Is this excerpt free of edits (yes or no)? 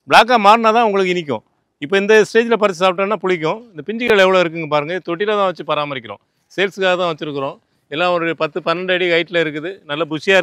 yes